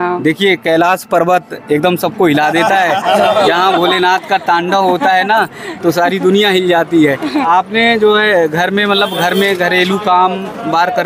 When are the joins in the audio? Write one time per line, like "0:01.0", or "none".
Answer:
0:07.4

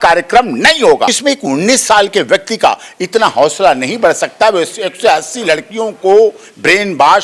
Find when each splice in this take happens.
0:01.2

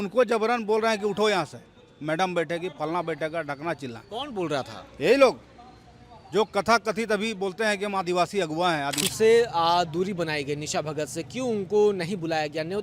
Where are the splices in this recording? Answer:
0:09.0

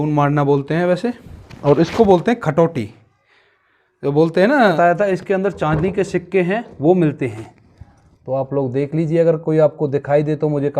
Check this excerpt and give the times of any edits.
0:04.8

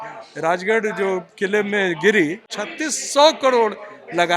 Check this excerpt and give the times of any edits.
0:02.6

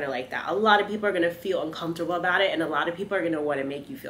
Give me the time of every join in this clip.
none

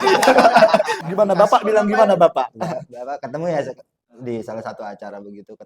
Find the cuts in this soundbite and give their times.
none

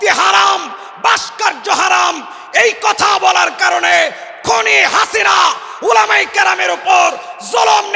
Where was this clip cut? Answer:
none

